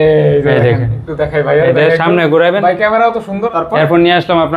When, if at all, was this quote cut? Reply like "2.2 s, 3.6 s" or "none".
3.4 s